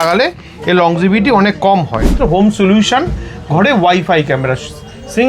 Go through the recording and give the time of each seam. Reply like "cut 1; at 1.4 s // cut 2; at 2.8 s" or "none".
cut 1; at 2.2 s